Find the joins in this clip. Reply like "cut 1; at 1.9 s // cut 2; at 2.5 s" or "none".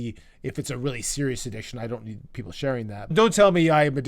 cut 1; at 3.1 s